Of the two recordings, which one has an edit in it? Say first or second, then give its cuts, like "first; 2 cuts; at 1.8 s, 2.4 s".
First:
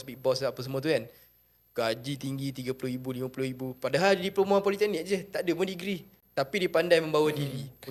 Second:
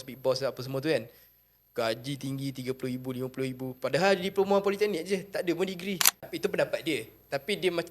second; 1 cut; at 6.3 s